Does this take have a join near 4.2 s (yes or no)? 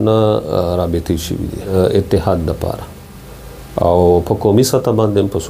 no